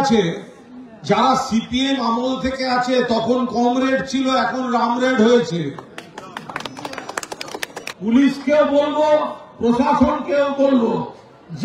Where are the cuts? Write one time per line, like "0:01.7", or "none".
0:07.9